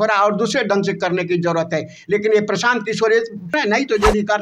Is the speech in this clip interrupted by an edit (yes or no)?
yes